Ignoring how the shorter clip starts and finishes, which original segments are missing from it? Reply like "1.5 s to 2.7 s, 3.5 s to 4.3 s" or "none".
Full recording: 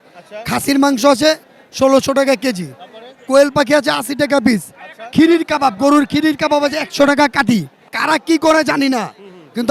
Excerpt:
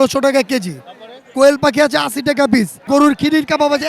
4.8 s to 5.8 s